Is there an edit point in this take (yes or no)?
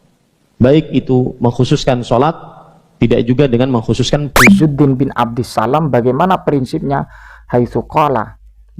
yes